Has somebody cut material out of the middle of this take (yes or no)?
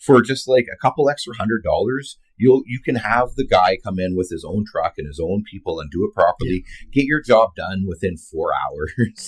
no